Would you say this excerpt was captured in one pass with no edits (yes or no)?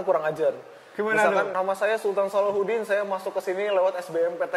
no